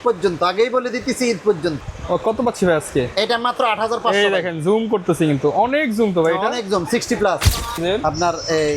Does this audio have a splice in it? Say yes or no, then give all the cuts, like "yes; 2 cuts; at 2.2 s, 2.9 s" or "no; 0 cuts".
yes; 2 cuts; at 1.8 s, 7.8 s